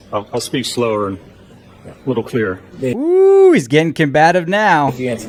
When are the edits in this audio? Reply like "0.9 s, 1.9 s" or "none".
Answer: none

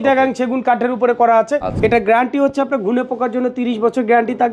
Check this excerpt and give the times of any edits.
1.7 s

